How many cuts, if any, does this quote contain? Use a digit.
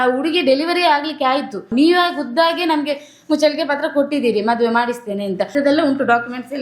2